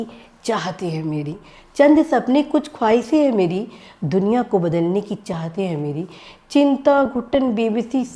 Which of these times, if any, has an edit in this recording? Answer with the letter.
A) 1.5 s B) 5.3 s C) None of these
C